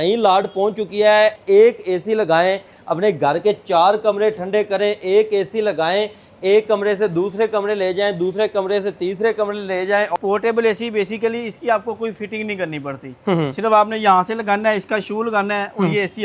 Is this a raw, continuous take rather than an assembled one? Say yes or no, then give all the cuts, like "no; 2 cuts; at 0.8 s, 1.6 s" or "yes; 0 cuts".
no; 2 cuts; at 1.4 s, 10.2 s